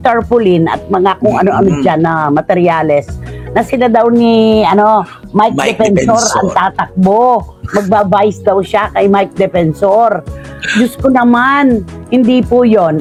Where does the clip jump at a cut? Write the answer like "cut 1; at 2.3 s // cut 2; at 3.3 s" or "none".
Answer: none